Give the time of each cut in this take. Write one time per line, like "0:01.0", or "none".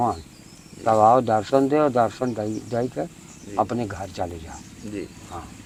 none